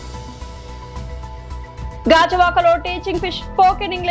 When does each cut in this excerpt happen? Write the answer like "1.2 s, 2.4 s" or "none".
2.0 s